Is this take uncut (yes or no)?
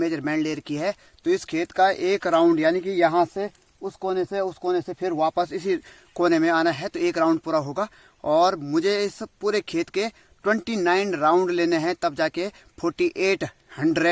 yes